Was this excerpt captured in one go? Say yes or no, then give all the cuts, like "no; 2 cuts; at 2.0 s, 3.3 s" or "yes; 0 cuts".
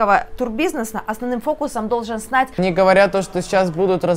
no; 1 cut; at 2.6 s